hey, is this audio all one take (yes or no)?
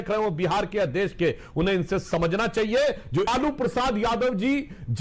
no